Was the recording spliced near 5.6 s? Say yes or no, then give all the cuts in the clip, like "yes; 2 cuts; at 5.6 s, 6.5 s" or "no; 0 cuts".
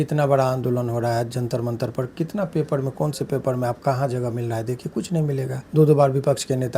yes; 1 cut; at 5.6 s